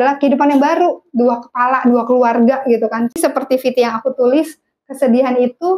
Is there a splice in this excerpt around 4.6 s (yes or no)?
no